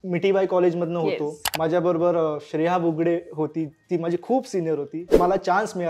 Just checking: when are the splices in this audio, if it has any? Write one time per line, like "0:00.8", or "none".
0:01.4
0:05.1